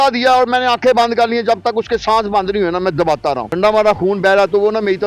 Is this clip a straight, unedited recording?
no; 1 cut; at 3.5 s

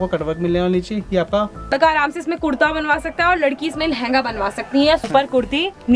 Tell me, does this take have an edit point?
yes; 2 cuts; at 1.7 s, 5.1 s

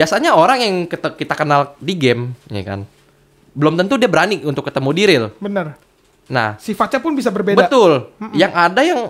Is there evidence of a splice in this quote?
no; 0 cuts

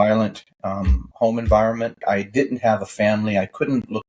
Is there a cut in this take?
yes; 2 cuts; at 1.0 s, 2.0 s

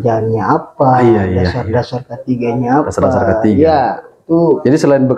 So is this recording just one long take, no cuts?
yes; 0 cuts

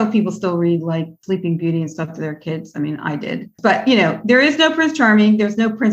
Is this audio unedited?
no; 1 cut; at 1.1 s

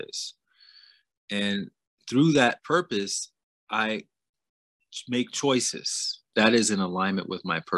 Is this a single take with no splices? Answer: no; 1 cut; at 6.3 s

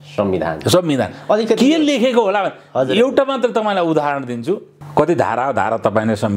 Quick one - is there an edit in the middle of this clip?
yes; 1 cut; at 4.8 s

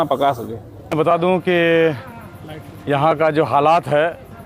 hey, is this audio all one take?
no; 1 cut; at 0.9 s

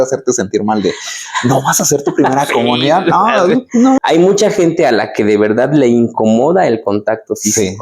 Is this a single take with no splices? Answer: no; 1 cut; at 4.0 s

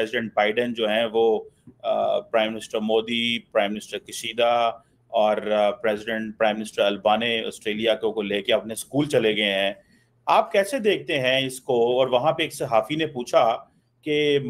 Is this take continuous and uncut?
yes; 0 cuts

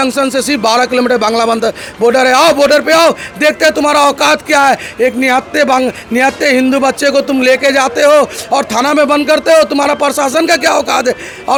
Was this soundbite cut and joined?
no; 0 cuts

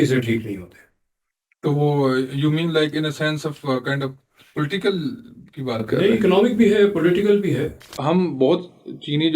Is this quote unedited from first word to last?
no; 1 cut; at 7.9 s

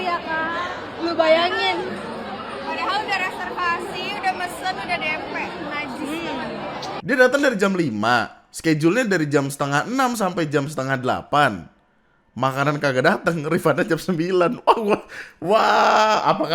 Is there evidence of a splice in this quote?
yes; 1 cut; at 7.0 s

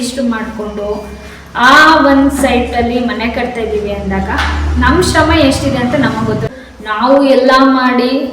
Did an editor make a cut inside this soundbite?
yes; 1 cut; at 6.5 s

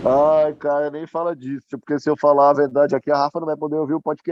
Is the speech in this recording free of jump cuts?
yes; 0 cuts

